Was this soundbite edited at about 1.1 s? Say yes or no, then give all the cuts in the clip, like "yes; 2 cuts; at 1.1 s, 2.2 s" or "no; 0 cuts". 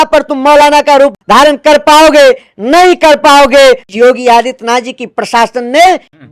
yes; 2 cuts; at 1.1 s, 3.9 s